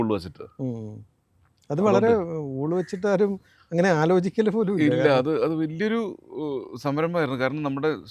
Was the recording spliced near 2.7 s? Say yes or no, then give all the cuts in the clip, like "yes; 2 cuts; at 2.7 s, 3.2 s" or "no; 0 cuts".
no; 0 cuts